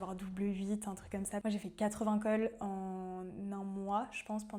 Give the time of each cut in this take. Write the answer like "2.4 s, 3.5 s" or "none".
1.4 s